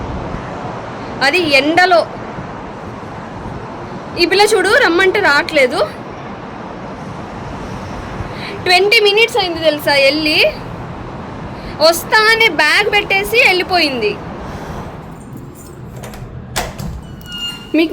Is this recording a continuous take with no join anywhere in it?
no; 1 cut; at 15.1 s

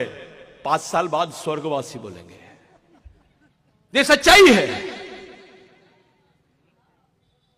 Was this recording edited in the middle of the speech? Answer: no; 0 cuts

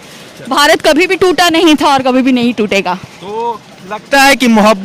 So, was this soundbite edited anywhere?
no; 0 cuts

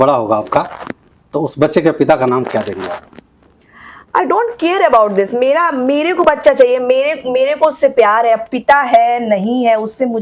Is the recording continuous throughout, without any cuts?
yes; 0 cuts

